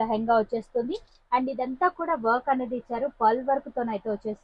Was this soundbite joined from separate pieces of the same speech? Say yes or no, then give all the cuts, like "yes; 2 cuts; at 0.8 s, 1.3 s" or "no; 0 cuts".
no; 0 cuts